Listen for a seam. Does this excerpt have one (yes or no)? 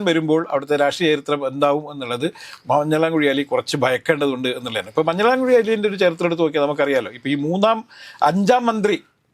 no